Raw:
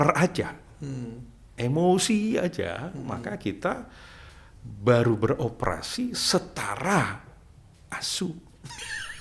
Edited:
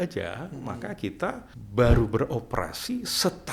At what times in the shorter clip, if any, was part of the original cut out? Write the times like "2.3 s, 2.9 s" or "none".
1.5 s